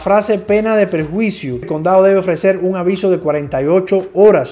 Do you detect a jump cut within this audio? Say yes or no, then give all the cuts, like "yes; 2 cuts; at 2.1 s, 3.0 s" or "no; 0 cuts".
yes; 1 cut; at 1.7 s